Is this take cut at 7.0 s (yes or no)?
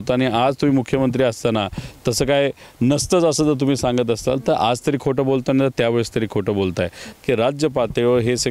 yes